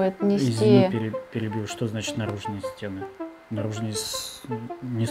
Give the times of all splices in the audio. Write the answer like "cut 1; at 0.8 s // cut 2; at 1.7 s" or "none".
none